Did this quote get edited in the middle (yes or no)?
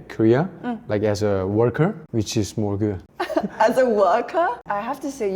yes